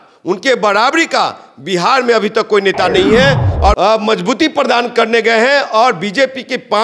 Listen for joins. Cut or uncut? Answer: cut